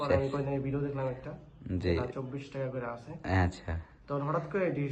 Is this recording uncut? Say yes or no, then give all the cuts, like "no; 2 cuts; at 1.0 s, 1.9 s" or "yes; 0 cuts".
yes; 0 cuts